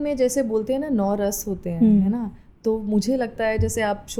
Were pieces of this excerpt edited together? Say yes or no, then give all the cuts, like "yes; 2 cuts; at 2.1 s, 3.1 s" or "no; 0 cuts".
no; 0 cuts